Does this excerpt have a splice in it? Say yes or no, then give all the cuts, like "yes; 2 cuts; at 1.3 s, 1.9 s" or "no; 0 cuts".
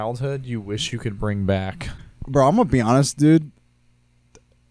yes; 1 cut; at 2.0 s